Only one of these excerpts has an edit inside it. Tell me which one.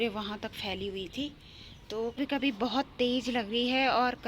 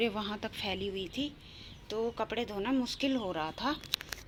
first; 1 cut; at 2.2 s

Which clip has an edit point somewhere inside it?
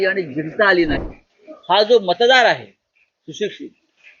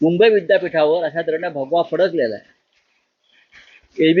first; 1 cut; at 1.0 s

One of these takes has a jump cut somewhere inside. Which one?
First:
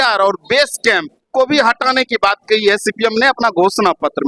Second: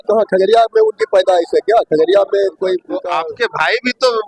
second; 1 cut; at 2.9 s

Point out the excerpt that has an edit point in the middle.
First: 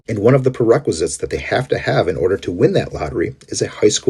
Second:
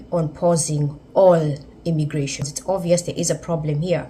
second; 1 cut; at 2.5 s

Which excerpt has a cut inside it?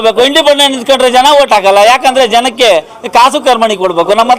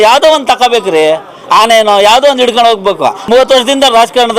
second; 1 cut; at 3.2 s

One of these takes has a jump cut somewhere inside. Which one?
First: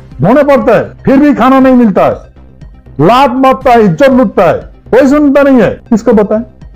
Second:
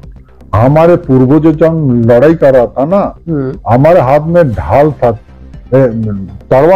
first; 3 cuts; at 0.9 s, 4.7 s, 5.8 s

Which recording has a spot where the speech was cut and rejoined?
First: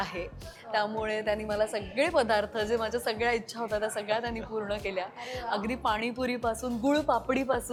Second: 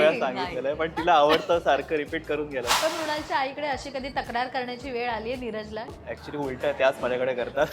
second; 2 cuts; at 2.7 s, 6.0 s

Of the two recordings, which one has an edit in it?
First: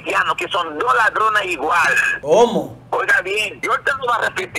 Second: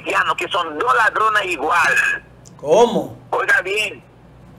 first; 2 cuts; at 2.1 s, 3.5 s

